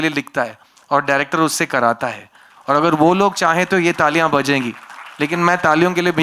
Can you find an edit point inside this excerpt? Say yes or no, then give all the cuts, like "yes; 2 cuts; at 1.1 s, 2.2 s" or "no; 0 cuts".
no; 0 cuts